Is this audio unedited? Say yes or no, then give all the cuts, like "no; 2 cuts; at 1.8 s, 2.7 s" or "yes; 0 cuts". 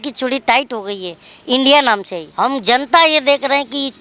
no; 1 cut; at 2.2 s